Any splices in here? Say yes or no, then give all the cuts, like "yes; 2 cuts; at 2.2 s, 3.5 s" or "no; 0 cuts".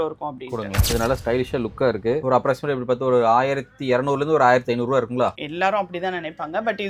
no; 0 cuts